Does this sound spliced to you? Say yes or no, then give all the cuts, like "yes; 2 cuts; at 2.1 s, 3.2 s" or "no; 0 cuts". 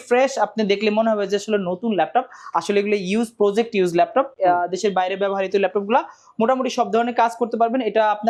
no; 0 cuts